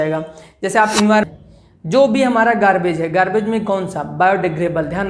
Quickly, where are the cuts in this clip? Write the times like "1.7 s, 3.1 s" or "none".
1.2 s